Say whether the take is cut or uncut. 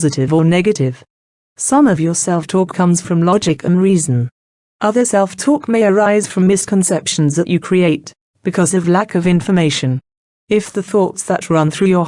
cut